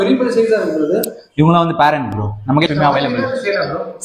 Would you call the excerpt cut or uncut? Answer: cut